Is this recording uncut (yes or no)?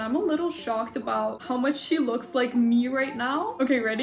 yes